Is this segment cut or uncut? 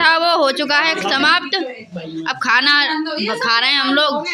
uncut